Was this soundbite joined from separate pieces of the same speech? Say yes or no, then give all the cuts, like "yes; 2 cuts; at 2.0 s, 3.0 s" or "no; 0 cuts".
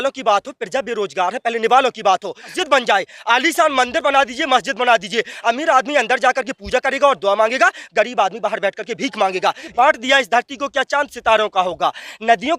yes; 2 cuts; at 2.6 s, 9.7 s